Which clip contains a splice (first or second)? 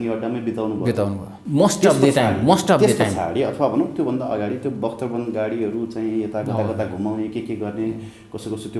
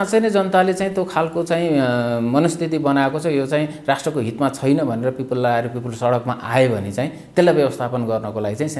first